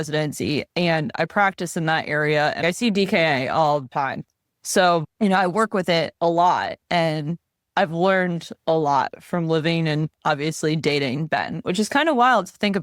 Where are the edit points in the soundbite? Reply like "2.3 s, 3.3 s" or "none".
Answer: 2.6 s, 3.9 s